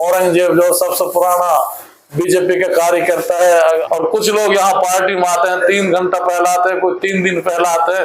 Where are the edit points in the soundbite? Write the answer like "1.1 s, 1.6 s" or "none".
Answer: 3.8 s